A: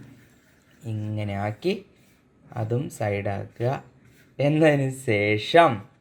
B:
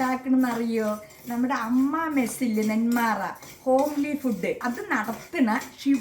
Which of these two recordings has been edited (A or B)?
B